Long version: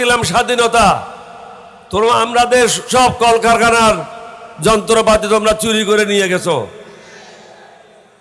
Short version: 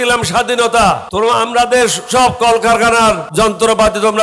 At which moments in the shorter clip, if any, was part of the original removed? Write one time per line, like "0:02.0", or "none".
0:01.1
0:03.3